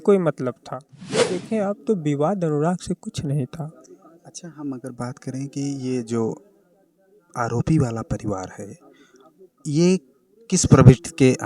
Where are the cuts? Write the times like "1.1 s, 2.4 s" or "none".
1.4 s